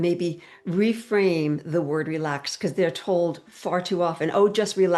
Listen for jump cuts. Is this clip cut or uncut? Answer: uncut